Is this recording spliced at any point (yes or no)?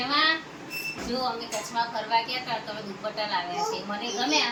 no